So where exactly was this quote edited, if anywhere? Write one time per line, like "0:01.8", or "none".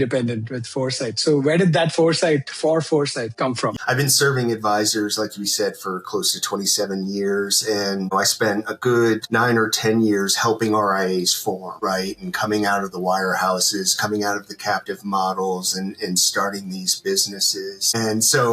0:03.8
0:08.1